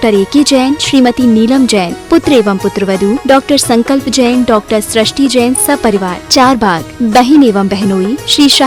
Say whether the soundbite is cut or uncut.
uncut